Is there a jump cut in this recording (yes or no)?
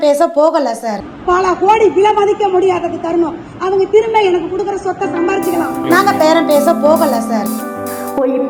no